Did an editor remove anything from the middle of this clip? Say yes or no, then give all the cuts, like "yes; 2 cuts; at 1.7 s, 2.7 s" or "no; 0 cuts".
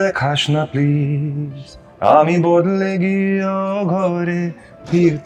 no; 0 cuts